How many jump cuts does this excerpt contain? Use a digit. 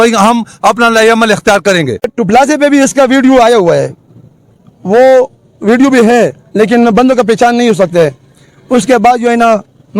1